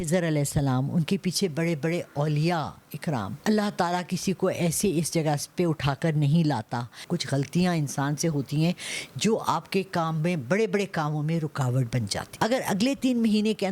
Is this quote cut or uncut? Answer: cut